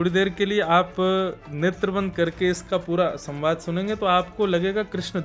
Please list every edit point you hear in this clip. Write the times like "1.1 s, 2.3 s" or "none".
1.4 s